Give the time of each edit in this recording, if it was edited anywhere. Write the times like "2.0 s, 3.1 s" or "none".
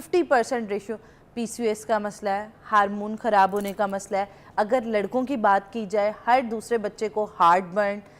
none